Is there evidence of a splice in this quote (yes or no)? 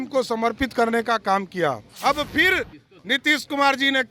yes